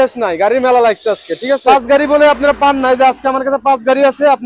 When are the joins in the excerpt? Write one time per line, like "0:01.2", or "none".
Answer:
0:01.6